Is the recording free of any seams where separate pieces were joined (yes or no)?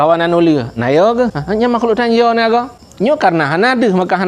no